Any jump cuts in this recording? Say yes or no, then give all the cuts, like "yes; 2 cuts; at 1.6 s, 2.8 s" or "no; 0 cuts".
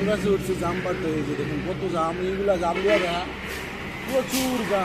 no; 0 cuts